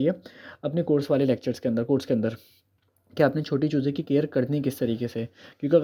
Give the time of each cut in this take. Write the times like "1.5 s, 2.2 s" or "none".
none